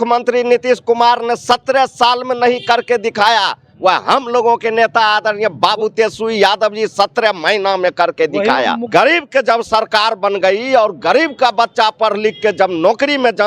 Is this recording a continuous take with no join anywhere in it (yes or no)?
no